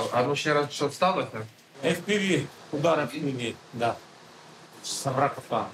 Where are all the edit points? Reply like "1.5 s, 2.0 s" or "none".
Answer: 1.7 s, 4.9 s